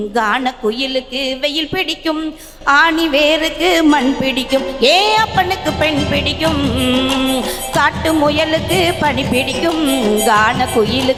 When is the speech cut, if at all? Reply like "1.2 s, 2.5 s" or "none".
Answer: none